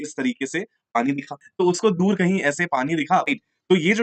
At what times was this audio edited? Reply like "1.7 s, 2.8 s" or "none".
3.1 s

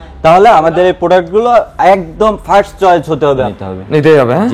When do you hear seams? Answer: 3.6 s

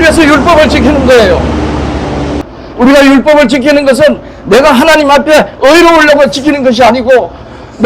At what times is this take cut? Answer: 2.4 s

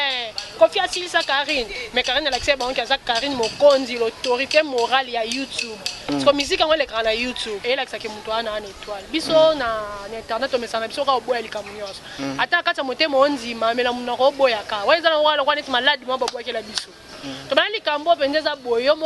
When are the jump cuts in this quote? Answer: 7.6 s

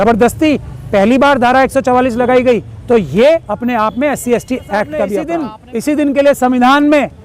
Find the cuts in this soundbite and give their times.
5.3 s

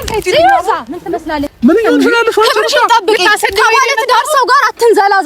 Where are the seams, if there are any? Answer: 1.5 s

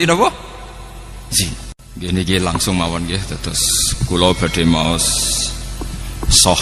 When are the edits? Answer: 1.8 s

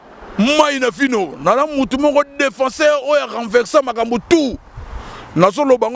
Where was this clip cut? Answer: none

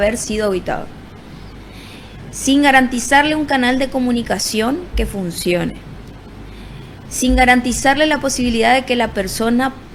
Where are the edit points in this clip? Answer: none

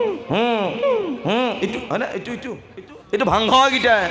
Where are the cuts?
2.6 s

